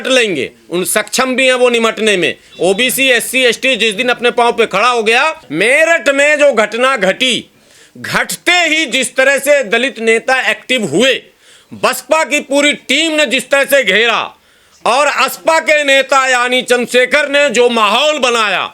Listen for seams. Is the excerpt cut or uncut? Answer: cut